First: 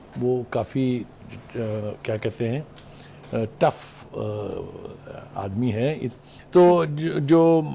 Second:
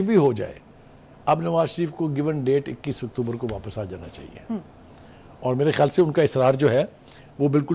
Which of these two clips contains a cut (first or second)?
first